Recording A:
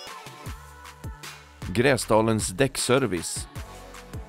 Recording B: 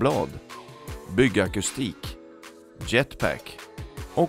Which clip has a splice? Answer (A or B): A